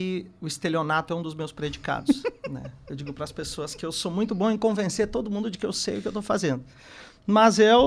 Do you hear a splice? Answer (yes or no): no